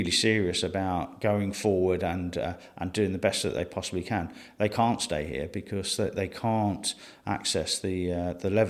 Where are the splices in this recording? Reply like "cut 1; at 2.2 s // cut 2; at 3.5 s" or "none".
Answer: cut 1; at 1.1 s